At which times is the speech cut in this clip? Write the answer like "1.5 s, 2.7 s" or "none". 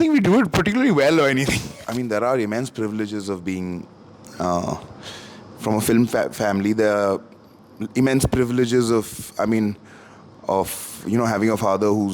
1.8 s